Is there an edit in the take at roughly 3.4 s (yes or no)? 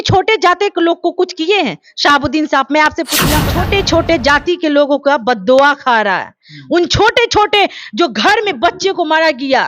yes